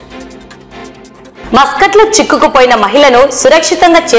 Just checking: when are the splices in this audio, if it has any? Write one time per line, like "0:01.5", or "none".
0:01.1